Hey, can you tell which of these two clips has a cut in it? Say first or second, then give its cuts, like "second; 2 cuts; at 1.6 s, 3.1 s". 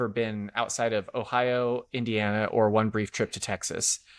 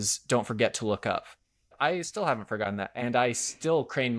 second; 2 cuts; at 1.7 s, 2.9 s